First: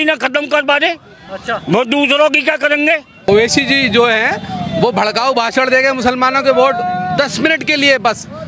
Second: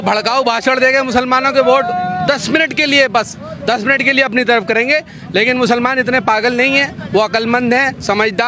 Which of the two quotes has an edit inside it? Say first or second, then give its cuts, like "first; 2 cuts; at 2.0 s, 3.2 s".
first; 1 cut; at 3.3 s